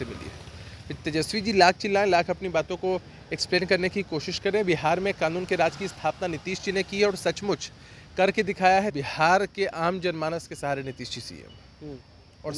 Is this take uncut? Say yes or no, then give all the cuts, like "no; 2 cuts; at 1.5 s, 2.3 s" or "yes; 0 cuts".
no; 1 cut; at 9.0 s